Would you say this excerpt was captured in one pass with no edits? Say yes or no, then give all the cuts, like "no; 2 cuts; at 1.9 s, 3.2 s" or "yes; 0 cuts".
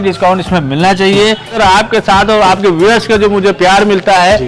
no; 1 cut; at 1.6 s